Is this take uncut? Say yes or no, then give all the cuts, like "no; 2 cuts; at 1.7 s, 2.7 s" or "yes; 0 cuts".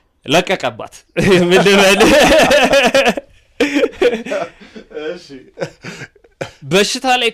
yes; 0 cuts